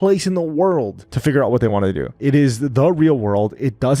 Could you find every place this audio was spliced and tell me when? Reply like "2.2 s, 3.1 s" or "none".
2.1 s